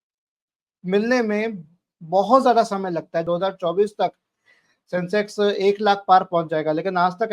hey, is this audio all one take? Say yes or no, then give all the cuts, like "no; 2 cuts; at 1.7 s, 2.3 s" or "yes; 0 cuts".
no; 1 cut; at 3.2 s